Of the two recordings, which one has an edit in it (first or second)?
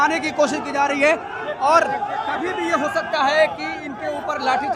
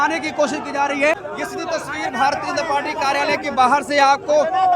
second